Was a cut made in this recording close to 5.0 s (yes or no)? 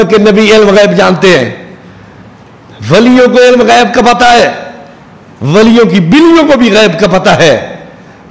no